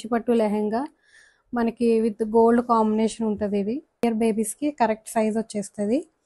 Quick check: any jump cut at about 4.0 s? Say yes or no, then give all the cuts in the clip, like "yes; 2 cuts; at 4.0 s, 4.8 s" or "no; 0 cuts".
yes; 1 cut; at 4.0 s